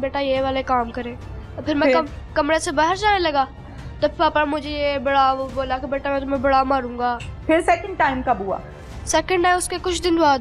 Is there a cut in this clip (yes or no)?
yes